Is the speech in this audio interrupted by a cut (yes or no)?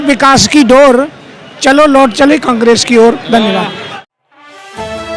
no